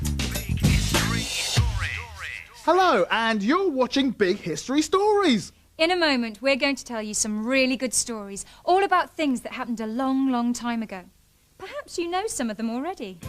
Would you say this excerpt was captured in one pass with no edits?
no; 1 cut; at 1.0 s

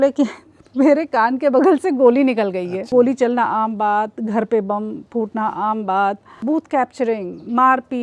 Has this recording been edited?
yes; 2 cuts; at 2.8 s, 6.3 s

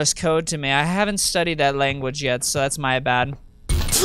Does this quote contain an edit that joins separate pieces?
no; 0 cuts

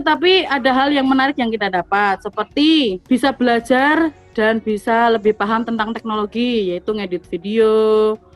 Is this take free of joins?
no; 1 cut; at 3.0 s

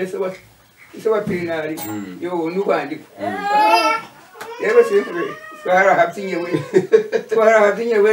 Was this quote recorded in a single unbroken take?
yes; 0 cuts

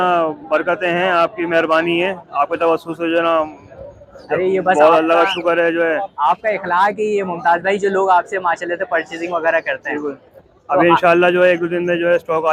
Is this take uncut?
yes; 0 cuts

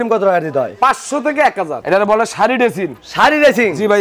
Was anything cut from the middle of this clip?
yes; 1 cut; at 1.8 s

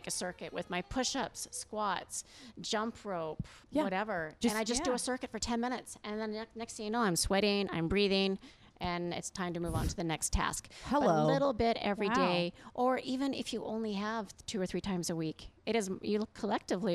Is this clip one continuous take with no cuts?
yes; 0 cuts

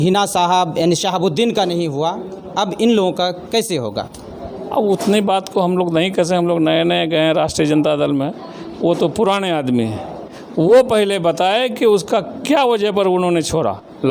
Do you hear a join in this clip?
no; 0 cuts

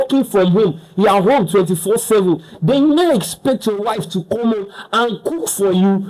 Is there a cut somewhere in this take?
no; 0 cuts

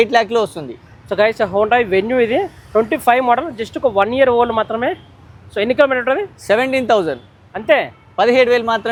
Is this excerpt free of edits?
yes; 0 cuts

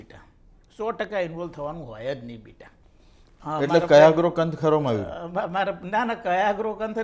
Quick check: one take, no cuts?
no; 1 cut; at 3.3 s

